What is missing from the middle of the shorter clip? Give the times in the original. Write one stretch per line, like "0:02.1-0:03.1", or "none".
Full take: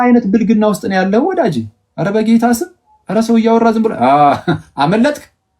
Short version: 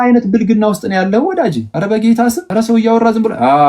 0:01.7-0:01.9
0:02.7-0:03.0